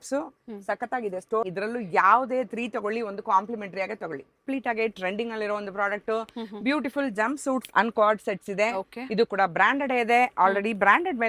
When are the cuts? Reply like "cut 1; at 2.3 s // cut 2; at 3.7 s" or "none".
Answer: cut 1; at 1.4 s // cut 2; at 4.5 s

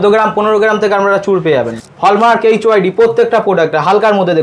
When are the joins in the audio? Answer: cut 1; at 1.8 s

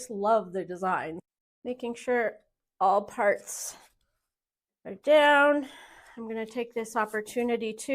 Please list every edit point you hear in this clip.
cut 1; at 1.2 s

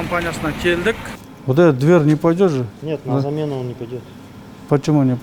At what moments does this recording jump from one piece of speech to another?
cut 1; at 1.3 s

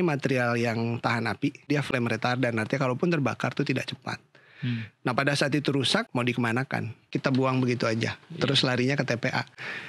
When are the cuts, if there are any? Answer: cut 1; at 1.7 s // cut 2; at 6.1 s // cut 3; at 7.0 s

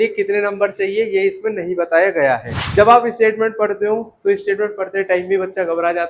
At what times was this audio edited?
cut 1; at 2.6 s

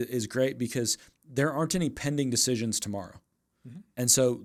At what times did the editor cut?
none

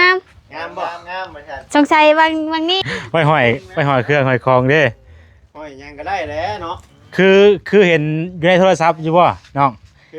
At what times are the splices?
cut 1; at 2.8 s

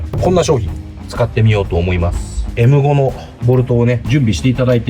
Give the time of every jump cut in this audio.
cut 1; at 2.4 s

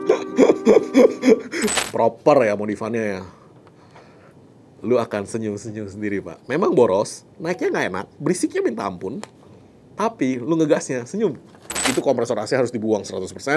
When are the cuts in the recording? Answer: cut 1; at 1.7 s // cut 2; at 11.9 s

